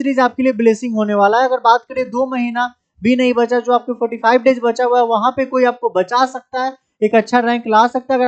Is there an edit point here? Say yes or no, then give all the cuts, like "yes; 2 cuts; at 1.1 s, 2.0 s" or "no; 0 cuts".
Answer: no; 0 cuts